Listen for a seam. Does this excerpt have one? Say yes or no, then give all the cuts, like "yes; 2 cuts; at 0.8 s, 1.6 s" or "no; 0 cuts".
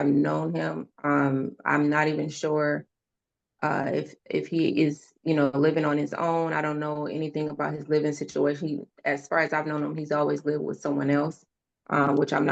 no; 0 cuts